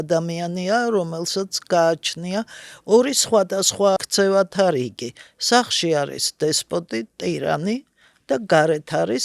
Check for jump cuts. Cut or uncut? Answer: cut